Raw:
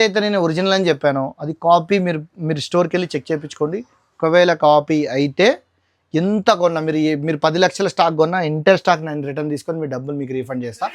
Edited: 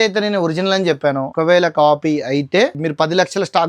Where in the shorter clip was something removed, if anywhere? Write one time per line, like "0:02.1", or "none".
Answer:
0:01.3
0:02.8